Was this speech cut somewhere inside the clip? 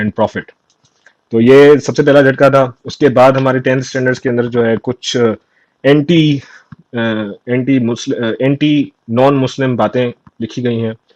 no; 0 cuts

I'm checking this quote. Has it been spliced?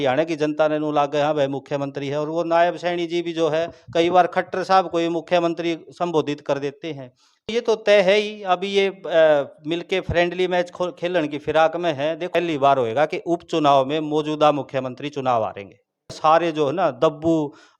yes; 3 cuts; at 7.5 s, 12.3 s, 16.2 s

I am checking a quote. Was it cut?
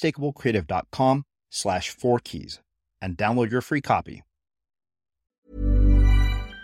yes; 1 cut; at 5.4 s

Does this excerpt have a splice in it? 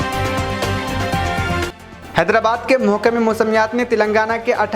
yes; 1 cut; at 1.4 s

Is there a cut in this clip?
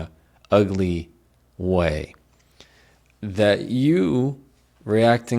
no; 0 cuts

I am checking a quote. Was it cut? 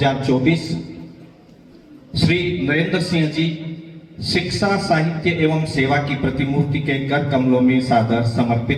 no; 0 cuts

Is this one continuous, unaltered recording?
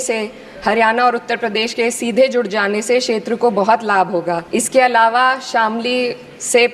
no; 1 cut; at 4.4 s

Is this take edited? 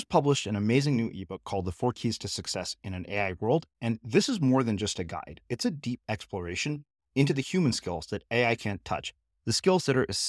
no; 0 cuts

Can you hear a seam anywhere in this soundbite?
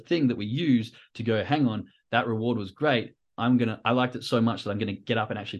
no; 0 cuts

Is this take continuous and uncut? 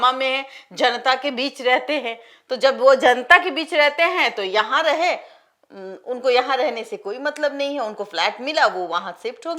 yes; 0 cuts

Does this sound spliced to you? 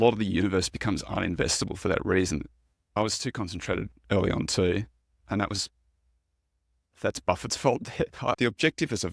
yes; 2 cuts; at 2.8 s, 8.4 s

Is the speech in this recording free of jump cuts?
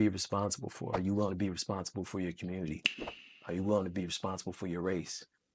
no; 1 cut; at 1.0 s

